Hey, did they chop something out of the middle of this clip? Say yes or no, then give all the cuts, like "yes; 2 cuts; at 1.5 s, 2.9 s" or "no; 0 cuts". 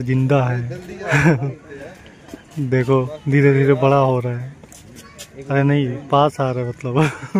no; 0 cuts